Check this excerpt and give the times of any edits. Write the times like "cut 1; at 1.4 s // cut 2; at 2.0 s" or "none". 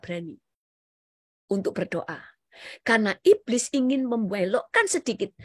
none